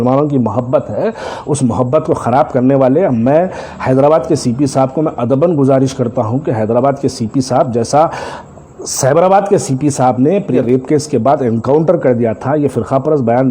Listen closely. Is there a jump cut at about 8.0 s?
no; 1 cut; at 10.6 s

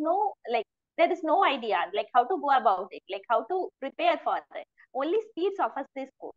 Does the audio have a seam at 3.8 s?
yes; 1 cut; at 3.8 s

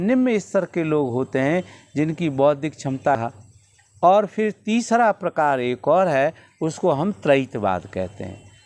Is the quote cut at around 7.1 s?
no; 1 cut; at 3.2 s

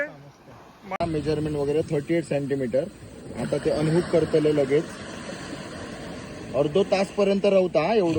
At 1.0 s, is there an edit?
yes; 1 cut; at 1.0 s

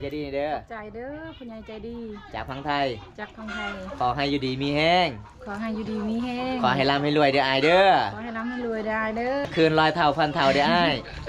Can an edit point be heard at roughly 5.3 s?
no; 1 cut; at 9.4 s

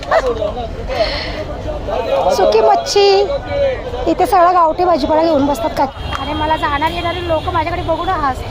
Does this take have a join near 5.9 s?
yes; 1 cut; at 5.9 s

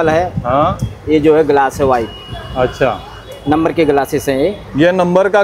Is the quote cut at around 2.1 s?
no; 0 cuts

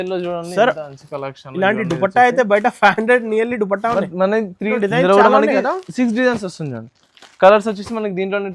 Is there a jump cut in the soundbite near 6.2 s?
no; 1 cut; at 4.8 s

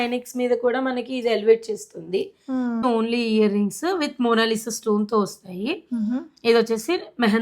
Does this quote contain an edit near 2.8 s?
yes; 1 cut; at 2.8 s

